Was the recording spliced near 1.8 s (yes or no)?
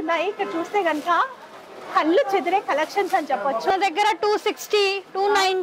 no